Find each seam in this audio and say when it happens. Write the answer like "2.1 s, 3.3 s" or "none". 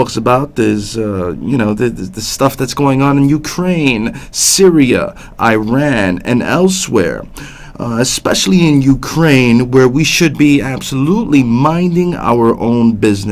7.8 s